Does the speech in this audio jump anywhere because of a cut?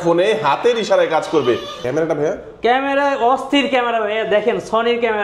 yes; 1 cut; at 1.7 s

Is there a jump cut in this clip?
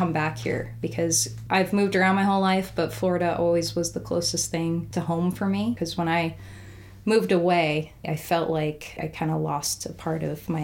yes; 4 cuts; at 4.9 s, 5.8 s, 8.1 s, 9.0 s

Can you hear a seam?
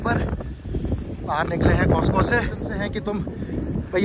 yes; 1 cut; at 3.0 s

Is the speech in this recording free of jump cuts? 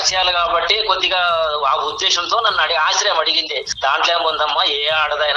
no; 1 cut; at 3.7 s

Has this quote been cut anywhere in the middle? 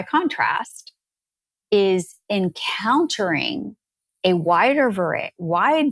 no; 0 cuts

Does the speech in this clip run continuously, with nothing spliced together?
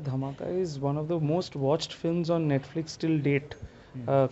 yes; 0 cuts

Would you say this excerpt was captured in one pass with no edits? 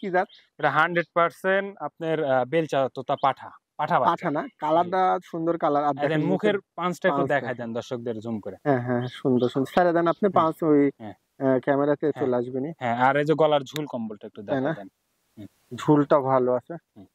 yes; 0 cuts

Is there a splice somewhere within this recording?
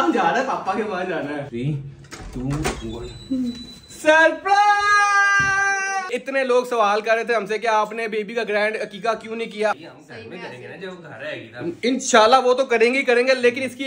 yes; 3 cuts; at 1.5 s, 6.1 s, 9.7 s

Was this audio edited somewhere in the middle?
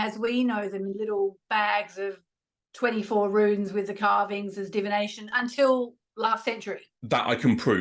no; 0 cuts

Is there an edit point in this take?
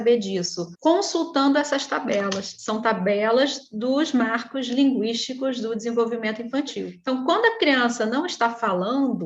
yes; 1 cut; at 7.0 s

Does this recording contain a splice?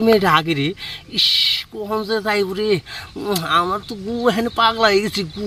no; 0 cuts

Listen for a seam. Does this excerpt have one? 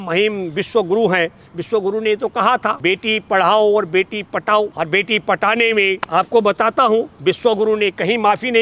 yes; 3 cuts; at 2.8 s, 4.7 s, 6.0 s

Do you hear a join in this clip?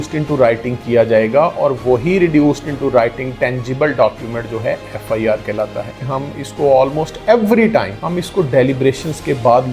yes; 2 cuts; at 6.0 s, 8.0 s

